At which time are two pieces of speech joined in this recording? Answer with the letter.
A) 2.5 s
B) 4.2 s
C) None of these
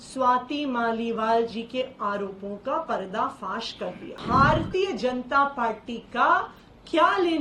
B